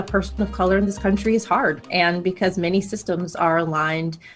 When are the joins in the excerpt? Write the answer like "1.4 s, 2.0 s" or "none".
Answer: none

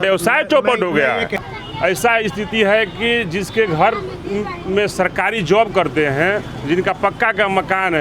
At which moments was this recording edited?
1.4 s

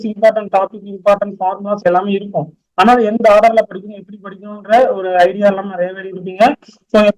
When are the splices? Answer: none

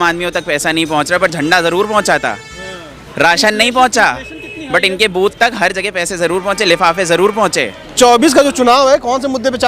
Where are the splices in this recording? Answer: 7.8 s

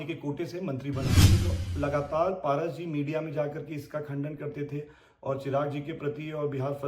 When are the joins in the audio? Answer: 1.2 s

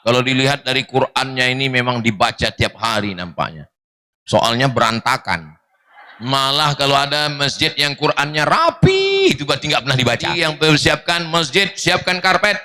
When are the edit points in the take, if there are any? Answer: 6.3 s, 10.3 s

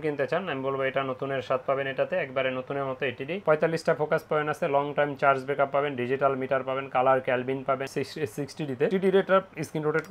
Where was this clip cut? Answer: 3.4 s, 7.8 s

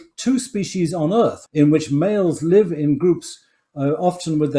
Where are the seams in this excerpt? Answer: 1.4 s

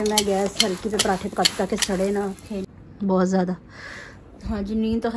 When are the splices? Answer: 2.6 s

